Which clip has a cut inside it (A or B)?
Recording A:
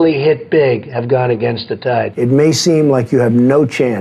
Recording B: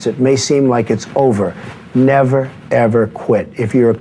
A